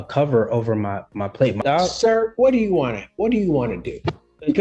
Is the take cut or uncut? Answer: cut